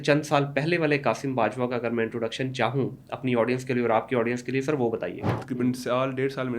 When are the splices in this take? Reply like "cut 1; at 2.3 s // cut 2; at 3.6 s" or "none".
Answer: cut 1; at 5.4 s